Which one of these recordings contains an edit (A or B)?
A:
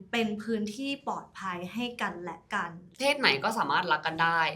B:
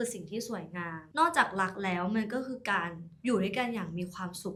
A